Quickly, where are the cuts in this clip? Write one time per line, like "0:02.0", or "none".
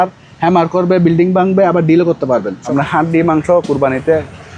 0:02.6